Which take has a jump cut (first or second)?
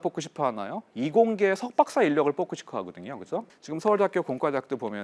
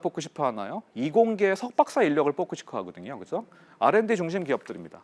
first